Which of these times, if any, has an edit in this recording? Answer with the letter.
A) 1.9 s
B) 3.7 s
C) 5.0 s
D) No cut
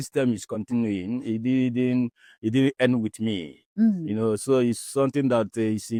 D